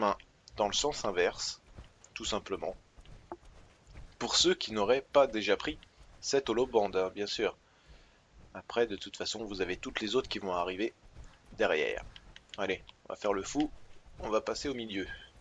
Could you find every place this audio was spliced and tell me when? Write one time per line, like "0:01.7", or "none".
none